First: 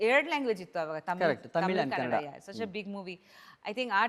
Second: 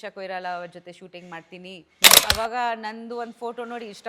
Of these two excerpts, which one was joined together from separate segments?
second; 1 cut; at 2.2 s

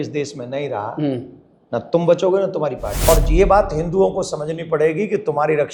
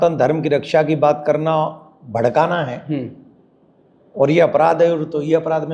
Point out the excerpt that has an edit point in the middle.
first; 1 cut; at 2.9 s

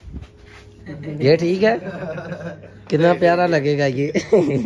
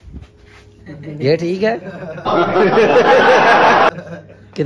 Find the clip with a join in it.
first; 1 cut; at 2.3 s

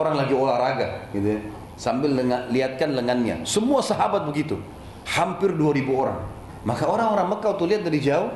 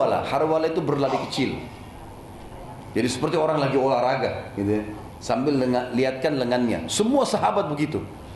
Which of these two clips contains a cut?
first; 1 cut; at 6.5 s

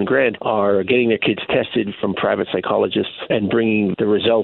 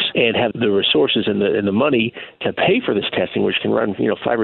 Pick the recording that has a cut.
first; 1 cut; at 3.2 s

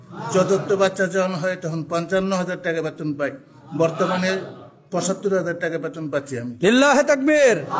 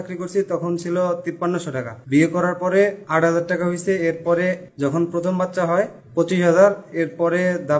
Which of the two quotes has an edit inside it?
second; 4 cuts; at 1.5 s, 3.0 s, 4.7 s, 6.0 s

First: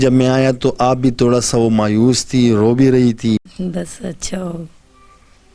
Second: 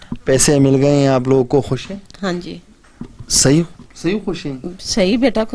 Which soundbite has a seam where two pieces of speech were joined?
first; 1 cut; at 3.6 s

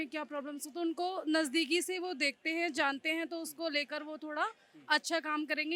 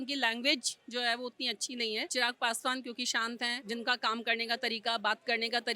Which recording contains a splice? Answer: second; 2 cuts; at 2.1 s, 3.6 s

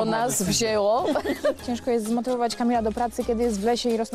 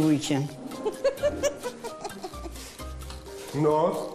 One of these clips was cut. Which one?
first; 1 cut; at 1.6 s

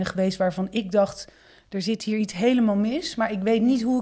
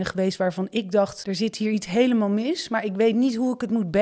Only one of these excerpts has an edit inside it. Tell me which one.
second; 1 cut; at 1.2 s

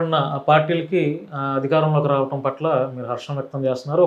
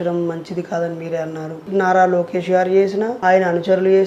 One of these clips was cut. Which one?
second; 2 cuts; at 1.7 s, 3.1 s

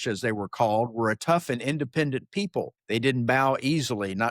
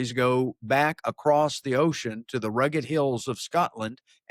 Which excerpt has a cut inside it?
first; 1 cut; at 2.8 s

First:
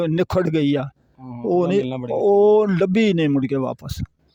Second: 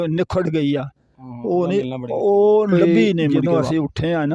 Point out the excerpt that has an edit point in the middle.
second; 1 cut; at 3.4 s

